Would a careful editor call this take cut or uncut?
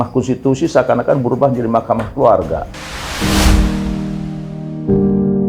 uncut